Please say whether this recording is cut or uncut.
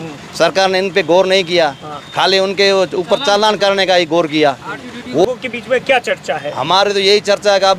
cut